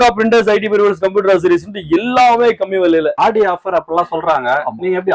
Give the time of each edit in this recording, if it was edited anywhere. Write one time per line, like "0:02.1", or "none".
0:03.2

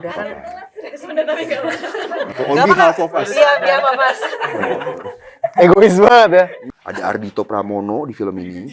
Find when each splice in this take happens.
0:06.6

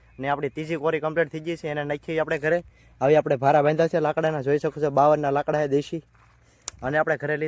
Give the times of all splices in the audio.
none

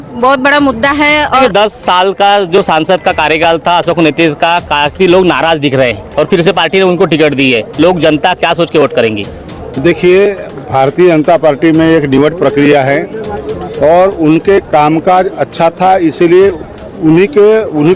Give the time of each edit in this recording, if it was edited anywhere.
0:01.4

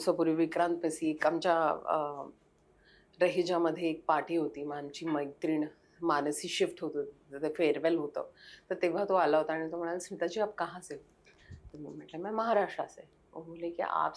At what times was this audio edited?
none

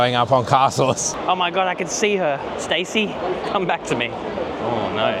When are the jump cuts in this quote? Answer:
0:01.1

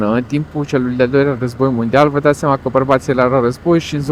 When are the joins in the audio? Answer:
none

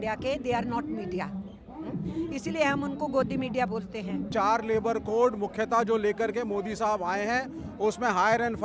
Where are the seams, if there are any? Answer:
0:04.3

